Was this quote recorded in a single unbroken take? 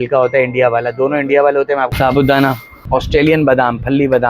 no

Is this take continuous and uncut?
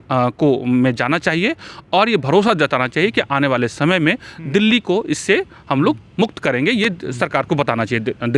yes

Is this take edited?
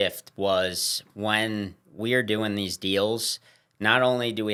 no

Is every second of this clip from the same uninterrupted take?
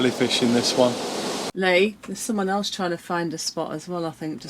no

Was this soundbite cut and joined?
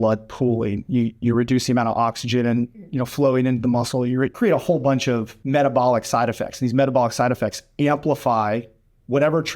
yes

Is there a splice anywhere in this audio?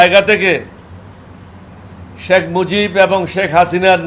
no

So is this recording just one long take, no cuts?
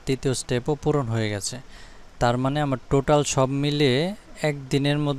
yes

